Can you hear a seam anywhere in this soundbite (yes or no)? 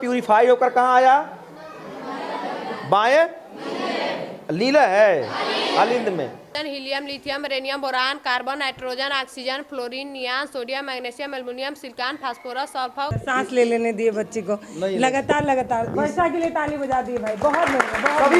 yes